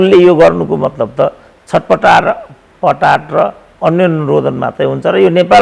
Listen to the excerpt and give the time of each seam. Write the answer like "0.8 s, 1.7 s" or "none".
none